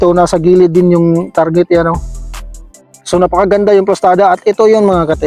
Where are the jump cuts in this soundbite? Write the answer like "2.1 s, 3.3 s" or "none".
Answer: none